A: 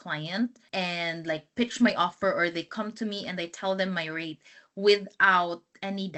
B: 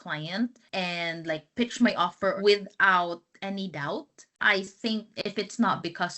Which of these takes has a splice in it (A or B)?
B